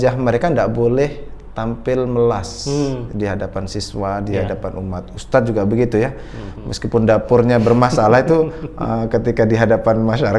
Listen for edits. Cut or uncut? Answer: uncut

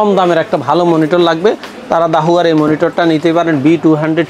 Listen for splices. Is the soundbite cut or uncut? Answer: uncut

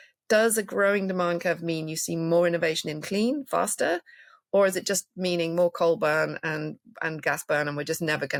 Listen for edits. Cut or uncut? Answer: uncut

